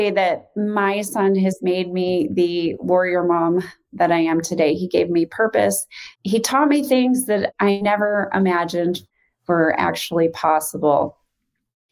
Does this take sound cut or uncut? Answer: uncut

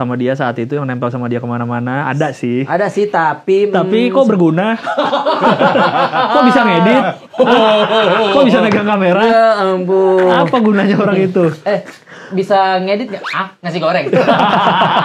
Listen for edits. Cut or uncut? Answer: uncut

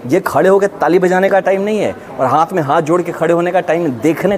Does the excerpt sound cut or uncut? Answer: uncut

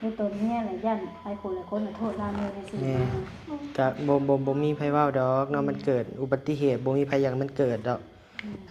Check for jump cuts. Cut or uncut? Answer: uncut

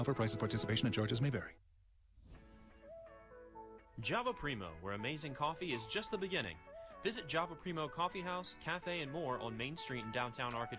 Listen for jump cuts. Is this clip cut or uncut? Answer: cut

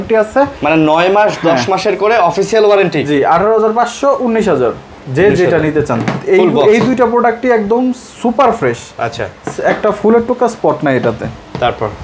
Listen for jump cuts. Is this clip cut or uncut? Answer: uncut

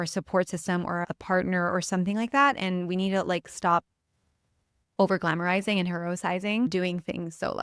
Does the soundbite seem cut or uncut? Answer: cut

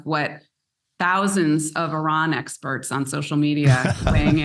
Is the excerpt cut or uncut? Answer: uncut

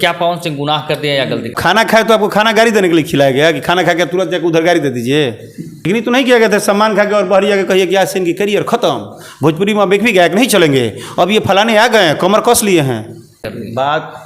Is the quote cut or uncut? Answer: cut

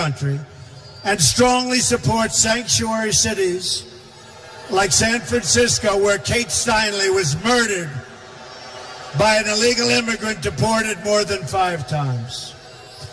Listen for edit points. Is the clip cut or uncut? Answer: uncut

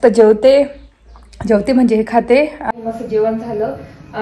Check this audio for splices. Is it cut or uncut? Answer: cut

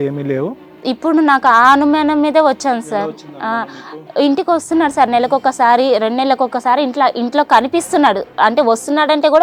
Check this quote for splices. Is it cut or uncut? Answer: uncut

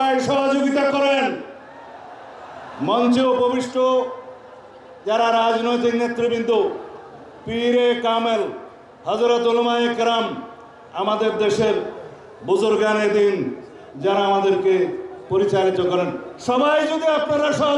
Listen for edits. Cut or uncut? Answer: uncut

